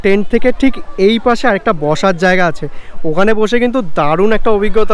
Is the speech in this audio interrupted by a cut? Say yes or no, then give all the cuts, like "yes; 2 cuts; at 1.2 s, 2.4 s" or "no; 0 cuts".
no; 0 cuts